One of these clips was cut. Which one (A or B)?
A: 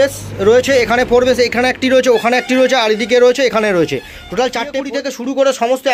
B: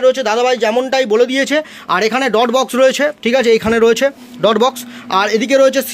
A